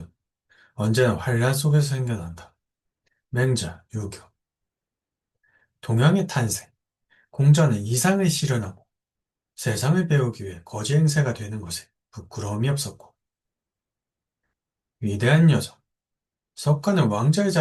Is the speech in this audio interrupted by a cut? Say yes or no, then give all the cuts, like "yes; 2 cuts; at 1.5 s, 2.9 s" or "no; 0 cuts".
no; 0 cuts